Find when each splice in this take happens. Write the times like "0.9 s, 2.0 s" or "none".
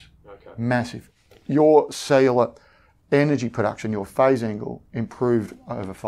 1.0 s